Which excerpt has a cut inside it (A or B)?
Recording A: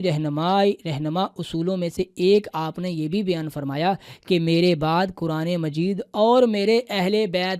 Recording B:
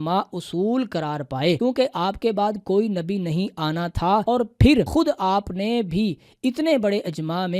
B